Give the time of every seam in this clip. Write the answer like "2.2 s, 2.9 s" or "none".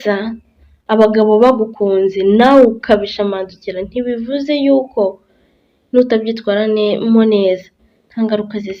none